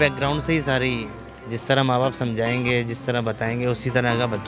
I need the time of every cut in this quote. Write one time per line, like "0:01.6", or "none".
none